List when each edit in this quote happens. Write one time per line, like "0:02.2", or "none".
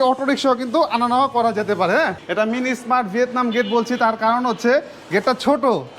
0:02.2

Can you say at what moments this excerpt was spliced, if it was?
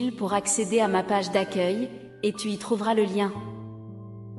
0:03.3

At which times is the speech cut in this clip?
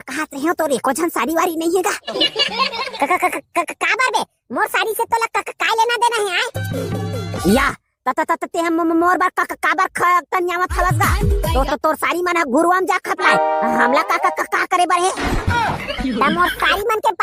none

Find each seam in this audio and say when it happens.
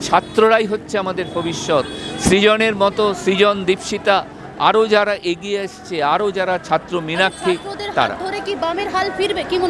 none

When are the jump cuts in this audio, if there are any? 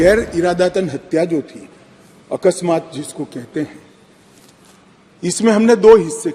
none

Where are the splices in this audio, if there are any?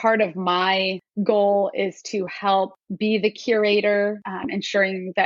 0:01.0
0:02.8
0:04.3

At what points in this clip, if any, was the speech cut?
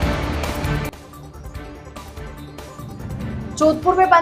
0:01.0

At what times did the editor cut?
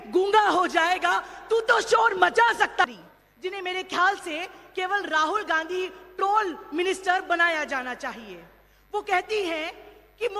0:02.8

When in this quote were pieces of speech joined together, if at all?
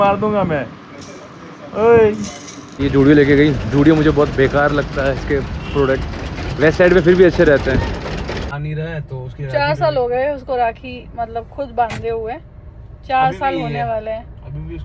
0:02.8
0:08.5

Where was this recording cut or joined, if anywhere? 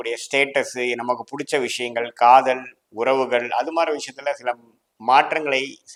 none

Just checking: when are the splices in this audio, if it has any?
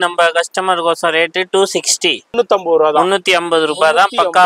0:02.3

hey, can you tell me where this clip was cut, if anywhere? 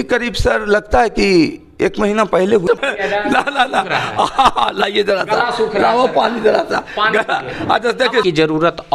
0:02.8
0:08.2

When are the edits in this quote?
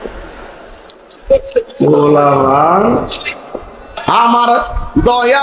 0:04.0

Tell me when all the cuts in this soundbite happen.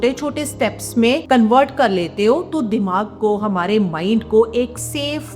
0:01.2

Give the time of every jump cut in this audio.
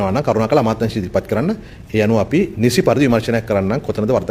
none

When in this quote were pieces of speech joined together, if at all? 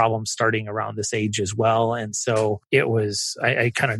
0:02.6

